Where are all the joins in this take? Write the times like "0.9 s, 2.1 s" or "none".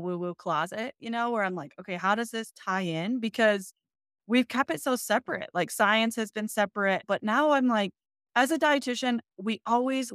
none